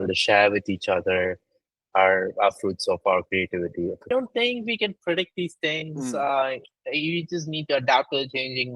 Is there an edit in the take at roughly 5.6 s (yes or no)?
no